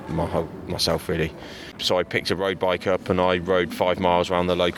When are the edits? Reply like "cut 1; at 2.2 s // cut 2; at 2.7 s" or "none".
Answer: cut 1; at 1.7 s